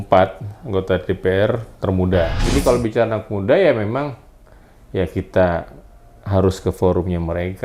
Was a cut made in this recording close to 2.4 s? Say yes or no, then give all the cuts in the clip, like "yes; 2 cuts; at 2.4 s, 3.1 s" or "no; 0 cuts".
yes; 1 cut; at 2.4 s